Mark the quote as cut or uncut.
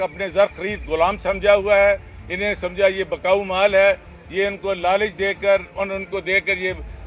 uncut